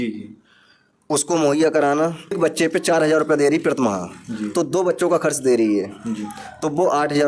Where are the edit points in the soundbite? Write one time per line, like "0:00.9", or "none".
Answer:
0:02.4